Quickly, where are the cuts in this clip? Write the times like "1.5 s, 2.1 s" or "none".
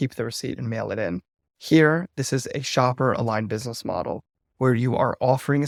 none